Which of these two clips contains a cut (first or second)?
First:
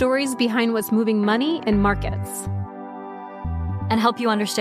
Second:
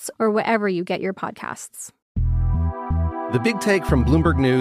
second